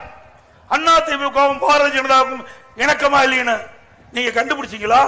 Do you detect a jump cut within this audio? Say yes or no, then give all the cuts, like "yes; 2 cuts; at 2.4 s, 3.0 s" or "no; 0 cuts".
no; 0 cuts